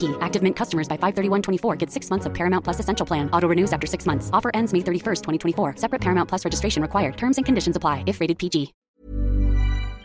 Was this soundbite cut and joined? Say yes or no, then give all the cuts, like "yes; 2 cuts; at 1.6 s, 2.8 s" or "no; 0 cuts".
yes; 1 cut; at 8.8 s